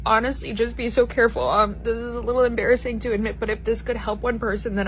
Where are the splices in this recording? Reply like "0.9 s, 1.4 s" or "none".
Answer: none